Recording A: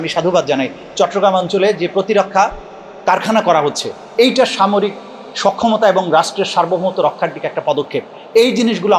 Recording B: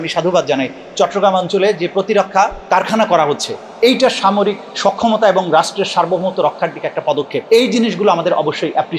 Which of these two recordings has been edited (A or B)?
B